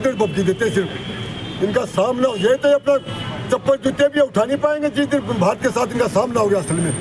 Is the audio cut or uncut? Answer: uncut